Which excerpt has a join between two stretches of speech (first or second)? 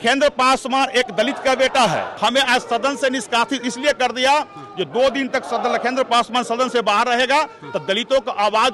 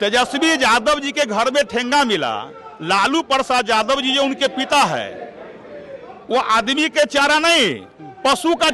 first